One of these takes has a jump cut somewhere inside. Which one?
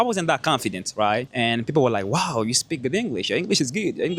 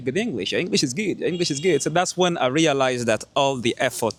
first; 1 cut; at 1.3 s

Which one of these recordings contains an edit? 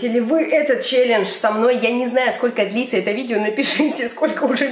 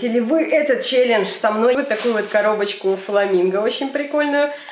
second; 1 cut; at 1.7 s

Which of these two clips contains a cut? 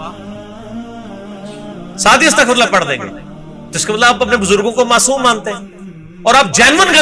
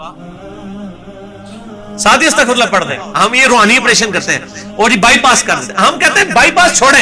second; 1 cut; at 3.0 s

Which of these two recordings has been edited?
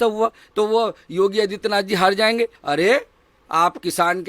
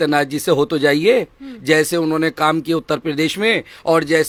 first; 1 cut; at 2.6 s

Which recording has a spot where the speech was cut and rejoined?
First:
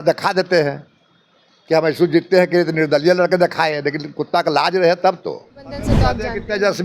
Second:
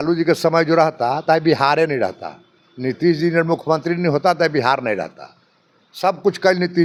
first; 1 cut; at 5.9 s

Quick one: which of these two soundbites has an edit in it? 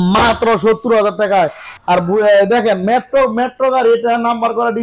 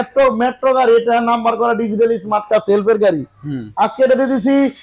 first; 1 cut; at 1.7 s

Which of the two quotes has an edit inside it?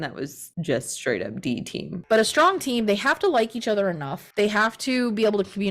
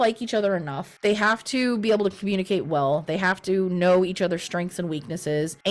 first; 1 cut; at 1.9 s

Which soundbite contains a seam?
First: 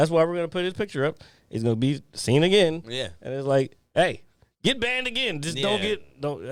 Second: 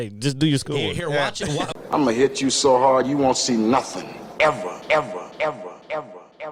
second; 1 cut; at 1.9 s

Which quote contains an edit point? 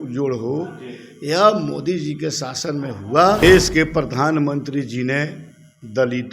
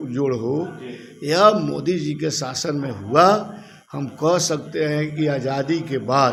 first; 1 cut; at 3.4 s

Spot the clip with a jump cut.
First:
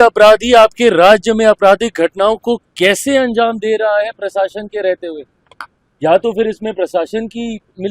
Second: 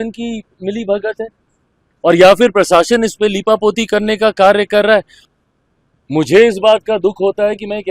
second; 1 cut; at 5.2 s

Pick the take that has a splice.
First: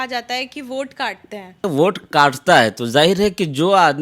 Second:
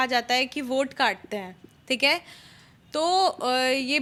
first; 1 cut; at 1.6 s

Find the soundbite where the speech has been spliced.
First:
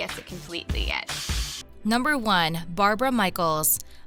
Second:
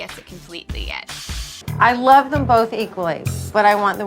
second; 1 cut; at 1.6 s

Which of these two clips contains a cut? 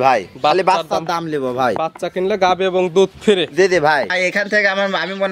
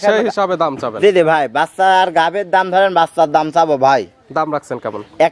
first; 1 cut; at 4.1 s

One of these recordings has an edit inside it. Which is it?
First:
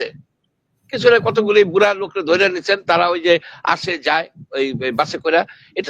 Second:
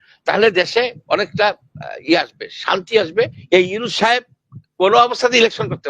second; 1 cut; at 3.4 s

